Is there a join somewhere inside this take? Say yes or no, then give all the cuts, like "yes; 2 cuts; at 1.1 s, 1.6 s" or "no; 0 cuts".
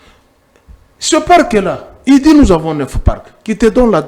no; 0 cuts